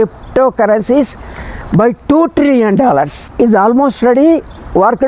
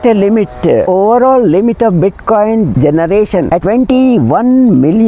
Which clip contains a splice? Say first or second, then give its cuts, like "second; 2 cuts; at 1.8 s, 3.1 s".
first; 1 cut; at 3.3 s